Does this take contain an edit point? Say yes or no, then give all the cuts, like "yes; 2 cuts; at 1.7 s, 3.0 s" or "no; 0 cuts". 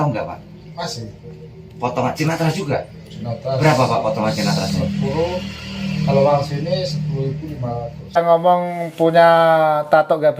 yes; 1 cut; at 8.2 s